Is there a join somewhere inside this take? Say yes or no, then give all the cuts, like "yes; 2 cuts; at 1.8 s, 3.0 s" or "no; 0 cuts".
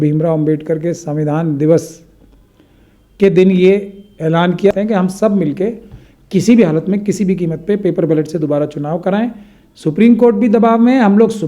yes; 1 cut; at 4.7 s